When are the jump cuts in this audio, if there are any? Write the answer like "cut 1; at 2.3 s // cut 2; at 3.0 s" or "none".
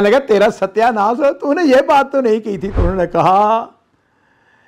cut 1; at 2.8 s